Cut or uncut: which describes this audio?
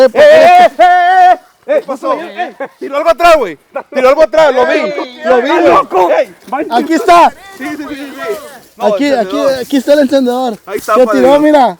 uncut